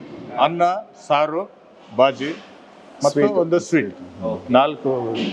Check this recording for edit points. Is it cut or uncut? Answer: uncut